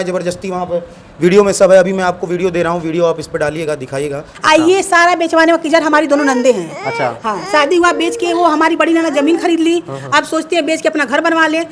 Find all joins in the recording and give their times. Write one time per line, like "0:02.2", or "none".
0:04.3